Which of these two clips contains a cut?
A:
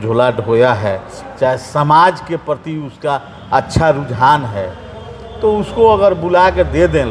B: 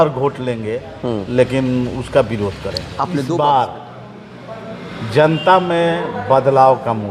B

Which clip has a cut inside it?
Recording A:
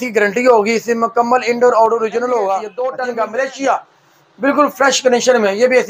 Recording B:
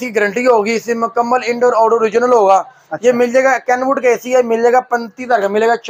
A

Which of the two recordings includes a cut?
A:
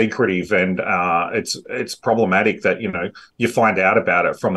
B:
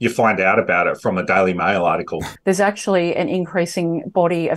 B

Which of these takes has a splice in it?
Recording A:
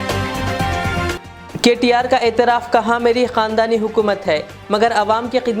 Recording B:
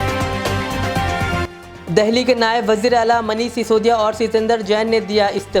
B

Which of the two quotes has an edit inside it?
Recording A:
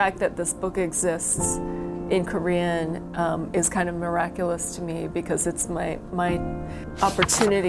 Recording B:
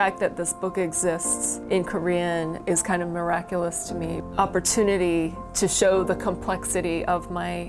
B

